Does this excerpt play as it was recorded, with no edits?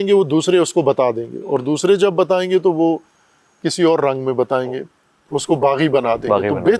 yes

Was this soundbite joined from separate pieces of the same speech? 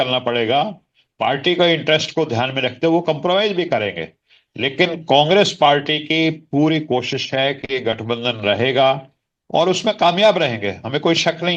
no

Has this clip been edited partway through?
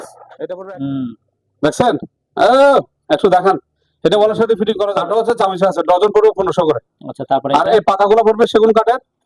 yes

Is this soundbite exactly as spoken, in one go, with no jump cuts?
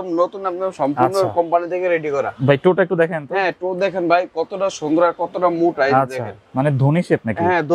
yes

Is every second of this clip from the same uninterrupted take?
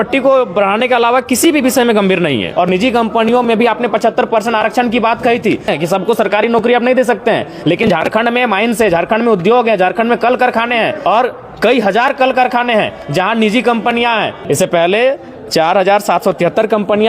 no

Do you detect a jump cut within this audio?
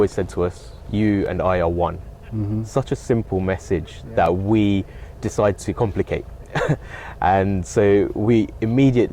no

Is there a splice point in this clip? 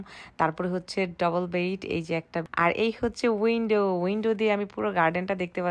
yes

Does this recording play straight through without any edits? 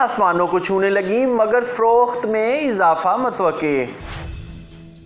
no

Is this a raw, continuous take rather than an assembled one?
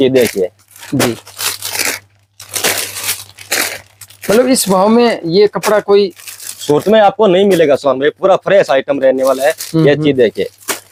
yes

